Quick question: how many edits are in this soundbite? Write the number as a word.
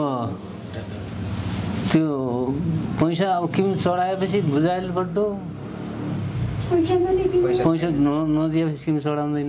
zero